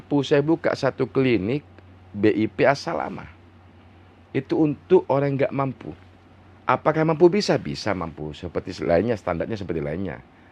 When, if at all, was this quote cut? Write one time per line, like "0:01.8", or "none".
none